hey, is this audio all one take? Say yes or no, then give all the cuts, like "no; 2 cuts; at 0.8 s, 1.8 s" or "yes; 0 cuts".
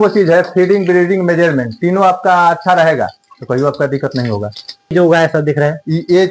no; 1 cut; at 4.9 s